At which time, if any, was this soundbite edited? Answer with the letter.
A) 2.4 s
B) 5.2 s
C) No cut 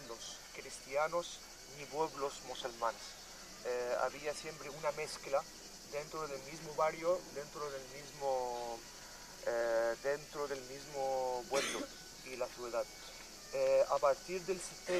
B